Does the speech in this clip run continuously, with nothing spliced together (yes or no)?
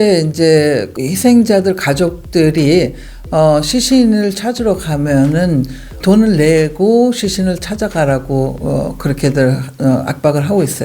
yes